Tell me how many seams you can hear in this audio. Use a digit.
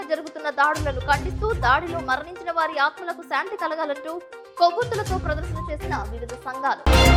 0